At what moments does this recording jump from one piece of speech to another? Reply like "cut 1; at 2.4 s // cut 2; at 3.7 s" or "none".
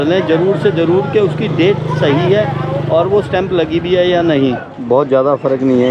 cut 1; at 4.7 s